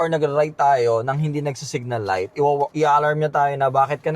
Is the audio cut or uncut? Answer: cut